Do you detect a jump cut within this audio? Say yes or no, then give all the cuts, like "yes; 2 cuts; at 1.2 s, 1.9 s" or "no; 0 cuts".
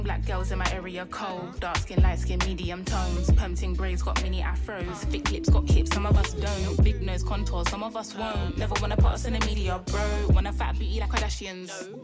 no; 0 cuts